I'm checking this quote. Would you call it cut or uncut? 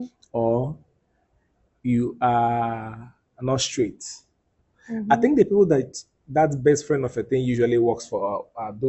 uncut